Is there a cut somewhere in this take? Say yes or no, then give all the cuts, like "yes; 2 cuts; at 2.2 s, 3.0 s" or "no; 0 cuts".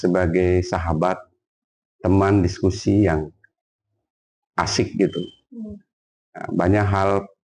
no; 0 cuts